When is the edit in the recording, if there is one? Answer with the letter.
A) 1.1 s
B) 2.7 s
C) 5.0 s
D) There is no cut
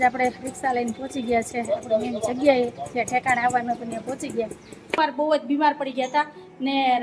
C